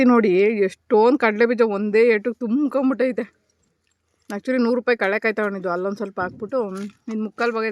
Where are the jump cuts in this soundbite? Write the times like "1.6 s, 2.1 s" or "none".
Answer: none